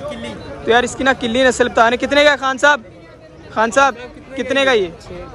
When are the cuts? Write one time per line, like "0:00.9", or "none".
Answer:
none